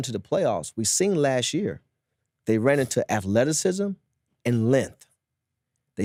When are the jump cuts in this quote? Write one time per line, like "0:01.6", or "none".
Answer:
none